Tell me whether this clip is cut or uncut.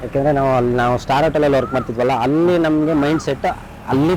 uncut